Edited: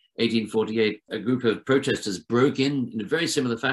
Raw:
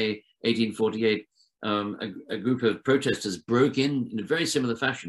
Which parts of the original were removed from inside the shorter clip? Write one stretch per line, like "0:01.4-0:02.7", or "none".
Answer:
0:01.3-0:02.3